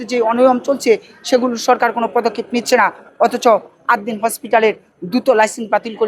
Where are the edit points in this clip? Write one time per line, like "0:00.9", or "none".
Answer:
none